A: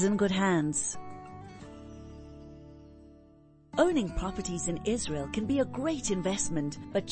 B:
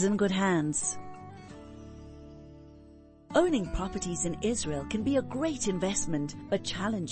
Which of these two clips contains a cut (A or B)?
B